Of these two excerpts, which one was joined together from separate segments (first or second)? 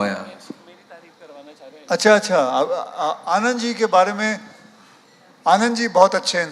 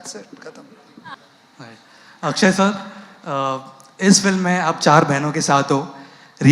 second